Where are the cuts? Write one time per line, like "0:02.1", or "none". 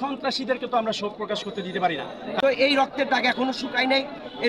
0:02.4